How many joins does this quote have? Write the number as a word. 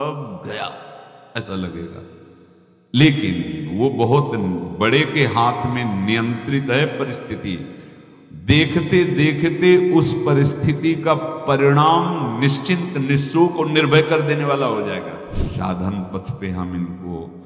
one